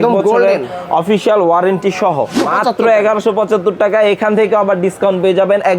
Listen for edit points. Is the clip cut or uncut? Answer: cut